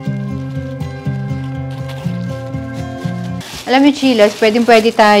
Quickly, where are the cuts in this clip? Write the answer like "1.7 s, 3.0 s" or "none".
3.4 s